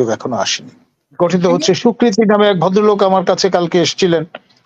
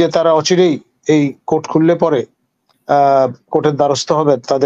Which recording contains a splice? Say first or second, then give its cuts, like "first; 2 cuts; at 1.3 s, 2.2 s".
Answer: first; 1 cut; at 1.1 s